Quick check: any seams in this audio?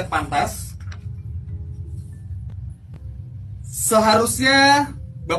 no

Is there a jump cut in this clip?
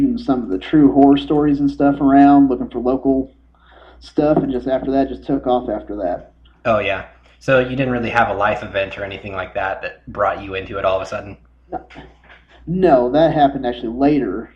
yes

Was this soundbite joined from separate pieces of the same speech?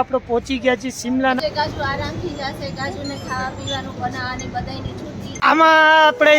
yes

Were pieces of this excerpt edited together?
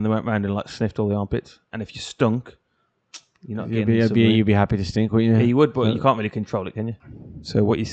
yes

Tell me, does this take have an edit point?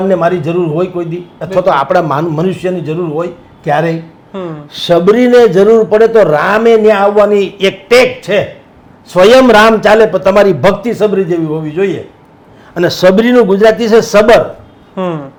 no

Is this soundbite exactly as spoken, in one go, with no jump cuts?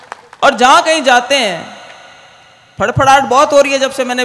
yes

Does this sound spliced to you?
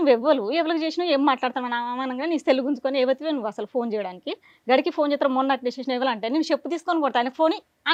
no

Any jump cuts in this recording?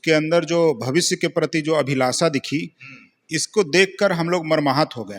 no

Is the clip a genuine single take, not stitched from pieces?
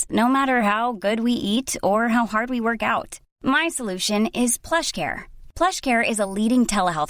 yes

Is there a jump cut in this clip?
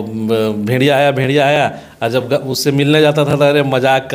no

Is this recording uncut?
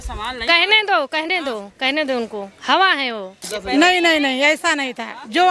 no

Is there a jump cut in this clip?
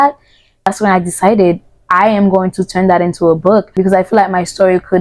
yes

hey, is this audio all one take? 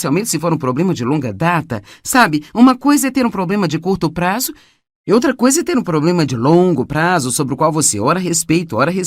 no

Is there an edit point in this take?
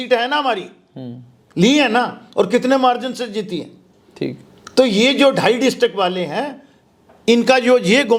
no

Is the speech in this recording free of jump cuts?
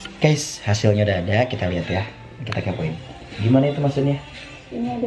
yes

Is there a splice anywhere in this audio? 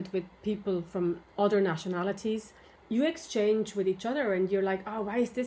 yes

